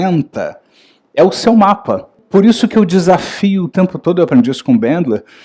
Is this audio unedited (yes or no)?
no